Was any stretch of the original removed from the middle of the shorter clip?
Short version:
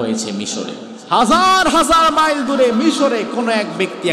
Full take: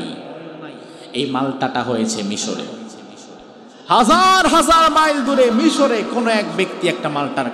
yes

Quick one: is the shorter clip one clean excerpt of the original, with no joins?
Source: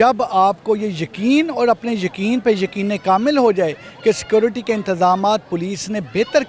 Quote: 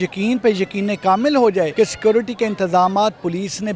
no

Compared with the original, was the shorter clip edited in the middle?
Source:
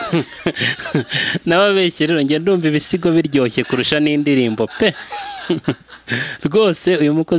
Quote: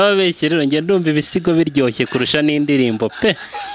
no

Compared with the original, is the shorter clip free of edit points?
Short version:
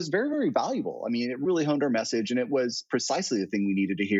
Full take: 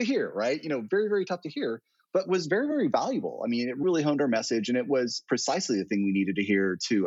yes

